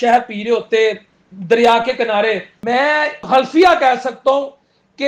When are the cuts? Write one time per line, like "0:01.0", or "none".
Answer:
0:02.9